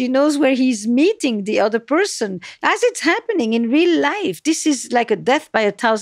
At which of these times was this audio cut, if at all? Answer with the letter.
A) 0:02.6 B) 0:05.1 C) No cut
A